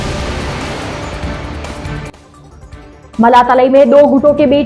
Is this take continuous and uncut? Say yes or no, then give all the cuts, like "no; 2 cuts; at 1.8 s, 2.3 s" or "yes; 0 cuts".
no; 1 cut; at 2.3 s